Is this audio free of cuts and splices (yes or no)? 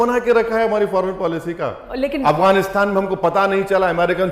no